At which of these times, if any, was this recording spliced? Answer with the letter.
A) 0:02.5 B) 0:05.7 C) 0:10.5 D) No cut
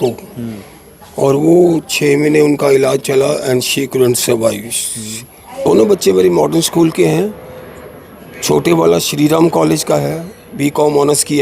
B